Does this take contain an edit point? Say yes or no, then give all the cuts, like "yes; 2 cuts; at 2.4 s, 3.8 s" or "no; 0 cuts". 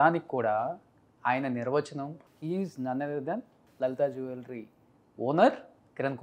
yes; 2 cuts; at 2.2 s, 3.6 s